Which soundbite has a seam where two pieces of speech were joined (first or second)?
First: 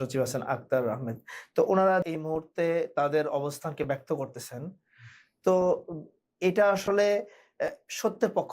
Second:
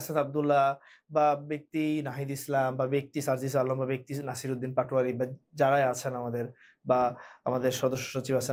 first